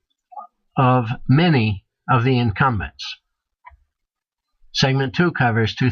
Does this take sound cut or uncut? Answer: cut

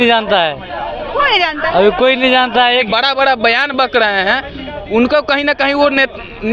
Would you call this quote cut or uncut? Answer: cut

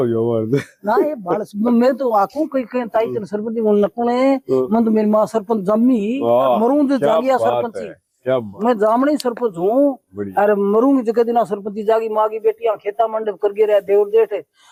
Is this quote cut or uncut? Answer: uncut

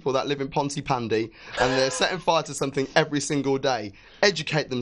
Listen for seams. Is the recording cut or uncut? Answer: uncut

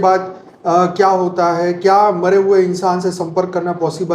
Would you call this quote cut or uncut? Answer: uncut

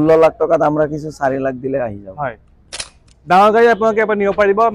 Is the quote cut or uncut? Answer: uncut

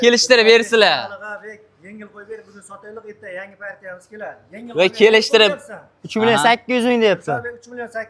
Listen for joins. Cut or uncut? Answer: uncut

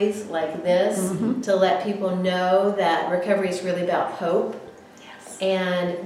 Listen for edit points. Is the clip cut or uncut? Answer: uncut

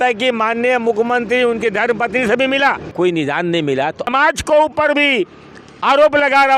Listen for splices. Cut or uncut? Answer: cut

